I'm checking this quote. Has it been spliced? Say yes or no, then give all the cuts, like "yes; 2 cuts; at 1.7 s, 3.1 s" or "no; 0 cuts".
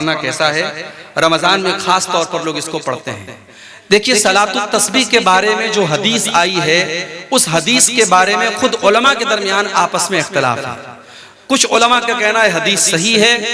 no; 0 cuts